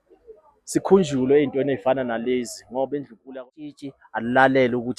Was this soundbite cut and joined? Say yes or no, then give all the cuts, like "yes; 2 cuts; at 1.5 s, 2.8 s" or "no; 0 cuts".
yes; 1 cut; at 3.2 s